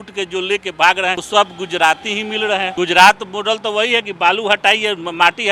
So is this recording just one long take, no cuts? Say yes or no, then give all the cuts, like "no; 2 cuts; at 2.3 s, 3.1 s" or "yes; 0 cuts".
no; 2 cuts; at 1.2 s, 2.7 s